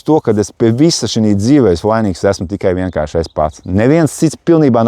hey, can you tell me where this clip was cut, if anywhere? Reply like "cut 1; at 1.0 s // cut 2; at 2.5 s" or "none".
none